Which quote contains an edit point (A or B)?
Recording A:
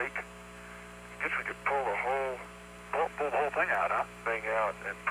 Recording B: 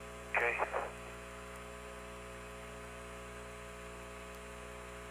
A